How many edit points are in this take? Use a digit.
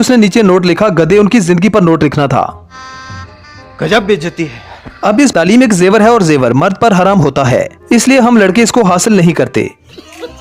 1